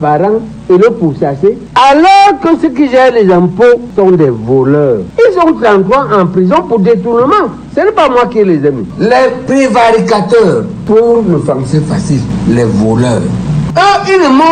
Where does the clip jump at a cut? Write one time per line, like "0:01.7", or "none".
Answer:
0:01.6
0:05.1
0:08.8